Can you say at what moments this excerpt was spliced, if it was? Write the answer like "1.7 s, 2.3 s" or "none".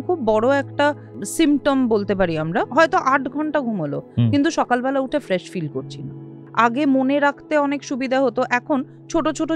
1.1 s, 2.7 s, 6.4 s